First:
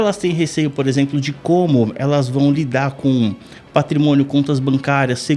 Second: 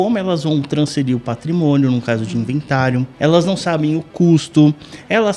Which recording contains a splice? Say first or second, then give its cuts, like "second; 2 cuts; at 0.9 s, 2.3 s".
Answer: second; 1 cut; at 3.1 s